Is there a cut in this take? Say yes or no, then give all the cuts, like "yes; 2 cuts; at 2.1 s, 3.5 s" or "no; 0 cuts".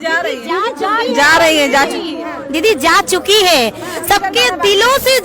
no; 0 cuts